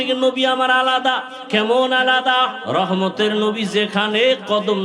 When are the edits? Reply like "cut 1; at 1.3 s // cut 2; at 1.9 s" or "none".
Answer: cut 1; at 1.3 s // cut 2; at 2.6 s

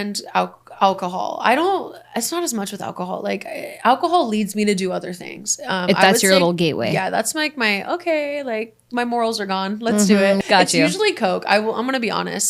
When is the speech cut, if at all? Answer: cut 1; at 10.4 s

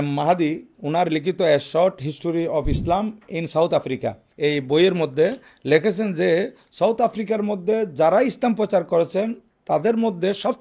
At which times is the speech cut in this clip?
cut 1; at 4.2 s

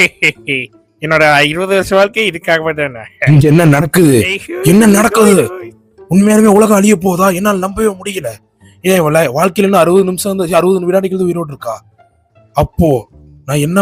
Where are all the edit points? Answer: none

